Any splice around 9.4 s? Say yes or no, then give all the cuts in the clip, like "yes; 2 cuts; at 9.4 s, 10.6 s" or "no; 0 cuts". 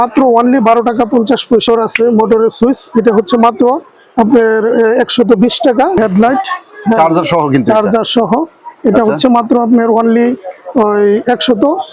no; 2 cuts; at 1.6 s, 6.0 s